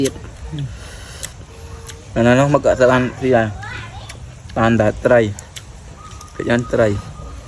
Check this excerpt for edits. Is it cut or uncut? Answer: uncut